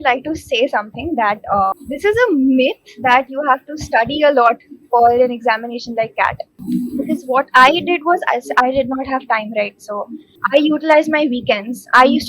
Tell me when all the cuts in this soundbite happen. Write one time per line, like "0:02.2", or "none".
0:01.7
0:06.5
0:10.3